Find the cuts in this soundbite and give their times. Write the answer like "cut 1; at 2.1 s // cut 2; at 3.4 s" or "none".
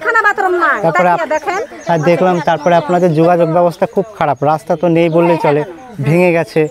none